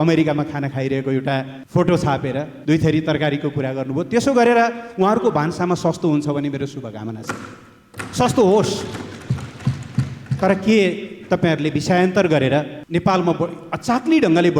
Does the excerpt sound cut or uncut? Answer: cut